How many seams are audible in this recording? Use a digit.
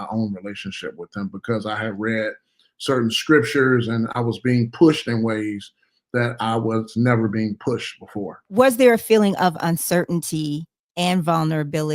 1